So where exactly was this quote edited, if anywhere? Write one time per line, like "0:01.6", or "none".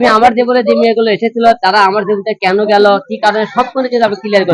none